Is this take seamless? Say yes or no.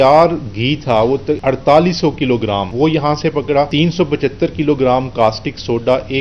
no